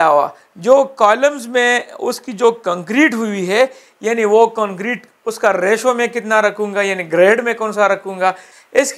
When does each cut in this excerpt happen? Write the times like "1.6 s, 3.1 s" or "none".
none